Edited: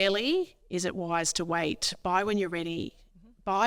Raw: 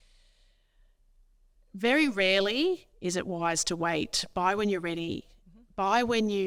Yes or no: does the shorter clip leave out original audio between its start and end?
no